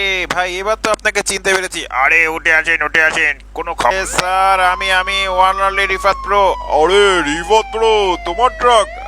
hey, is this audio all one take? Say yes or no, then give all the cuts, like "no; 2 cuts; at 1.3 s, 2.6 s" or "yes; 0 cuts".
no; 1 cut; at 3.9 s